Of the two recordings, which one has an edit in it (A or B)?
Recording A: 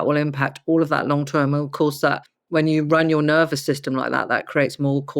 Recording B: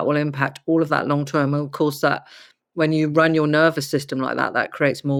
A